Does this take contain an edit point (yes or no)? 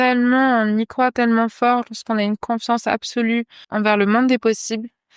yes